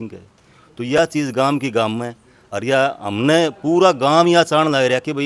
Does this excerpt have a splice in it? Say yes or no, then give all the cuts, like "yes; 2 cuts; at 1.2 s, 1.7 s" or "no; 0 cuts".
no; 0 cuts